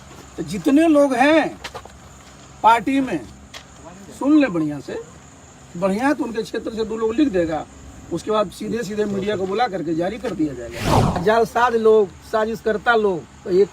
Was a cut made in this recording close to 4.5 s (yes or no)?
no